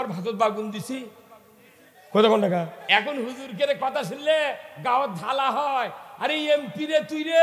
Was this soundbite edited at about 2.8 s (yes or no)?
yes